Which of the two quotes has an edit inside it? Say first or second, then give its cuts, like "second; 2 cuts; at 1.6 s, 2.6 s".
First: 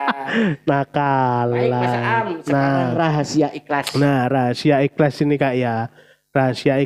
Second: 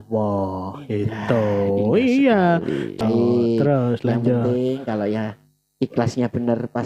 second; 1 cut; at 3.0 s